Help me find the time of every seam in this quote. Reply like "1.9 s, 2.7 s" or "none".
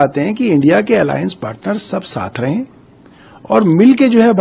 none